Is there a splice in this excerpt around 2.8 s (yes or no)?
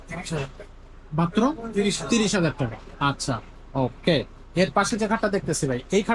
no